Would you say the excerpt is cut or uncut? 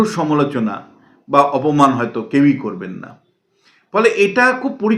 uncut